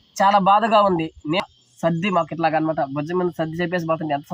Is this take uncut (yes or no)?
no